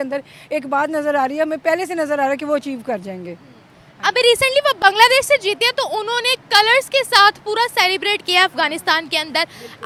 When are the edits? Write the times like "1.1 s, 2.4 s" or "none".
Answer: none